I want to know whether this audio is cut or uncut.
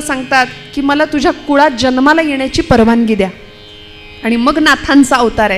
uncut